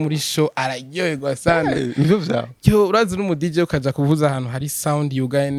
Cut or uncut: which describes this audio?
uncut